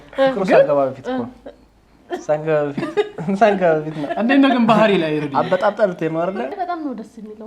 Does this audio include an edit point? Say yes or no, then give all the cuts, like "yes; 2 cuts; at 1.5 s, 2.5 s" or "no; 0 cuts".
yes; 1 cut; at 6.5 s